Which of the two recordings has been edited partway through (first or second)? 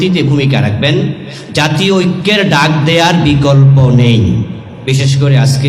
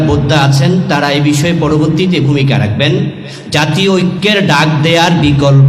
first